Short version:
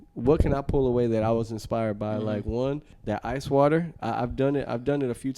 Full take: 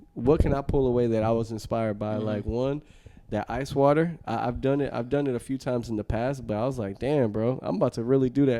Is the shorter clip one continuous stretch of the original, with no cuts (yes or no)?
no